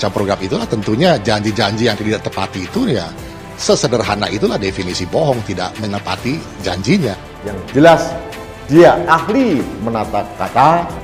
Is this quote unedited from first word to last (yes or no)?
yes